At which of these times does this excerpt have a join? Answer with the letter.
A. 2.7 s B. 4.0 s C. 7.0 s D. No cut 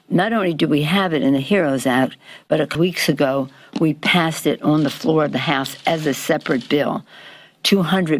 A